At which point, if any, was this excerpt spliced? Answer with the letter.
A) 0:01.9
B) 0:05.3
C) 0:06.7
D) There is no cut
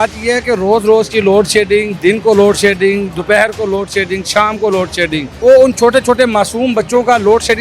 B